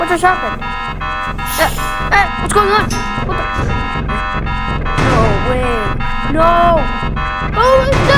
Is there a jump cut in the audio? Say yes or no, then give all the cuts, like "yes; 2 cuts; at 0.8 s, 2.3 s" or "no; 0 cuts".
no; 0 cuts